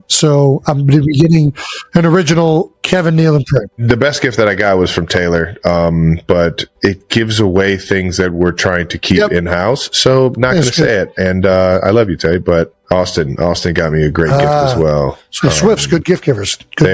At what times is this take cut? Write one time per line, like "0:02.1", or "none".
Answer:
none